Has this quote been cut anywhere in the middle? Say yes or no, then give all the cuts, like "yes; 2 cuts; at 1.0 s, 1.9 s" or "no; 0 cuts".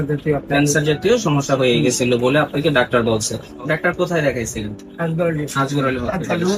no; 0 cuts